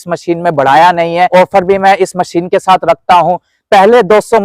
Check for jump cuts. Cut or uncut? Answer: cut